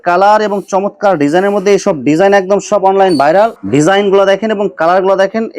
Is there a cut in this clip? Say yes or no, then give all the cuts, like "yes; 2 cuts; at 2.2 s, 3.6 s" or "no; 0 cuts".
yes; 1 cut; at 3.6 s